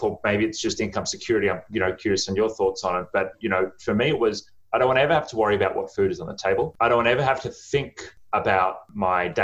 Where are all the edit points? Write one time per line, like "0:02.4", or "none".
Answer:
0:06.7